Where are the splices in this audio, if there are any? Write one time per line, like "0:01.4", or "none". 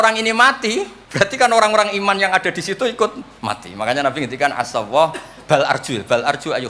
0:01.0
0:03.3